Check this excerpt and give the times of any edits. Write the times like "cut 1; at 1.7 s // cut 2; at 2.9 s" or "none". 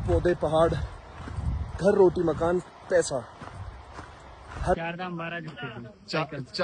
cut 1; at 4.8 s